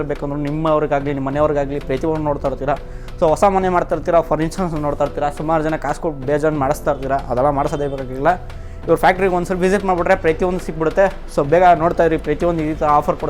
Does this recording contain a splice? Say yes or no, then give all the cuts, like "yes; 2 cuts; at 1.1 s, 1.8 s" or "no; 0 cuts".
no; 0 cuts